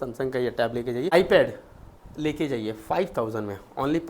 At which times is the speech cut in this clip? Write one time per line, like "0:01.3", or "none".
0:01.1